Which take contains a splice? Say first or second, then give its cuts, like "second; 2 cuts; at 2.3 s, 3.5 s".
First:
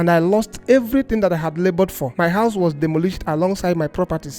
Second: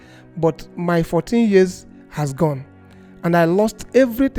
first; 1 cut; at 2.0 s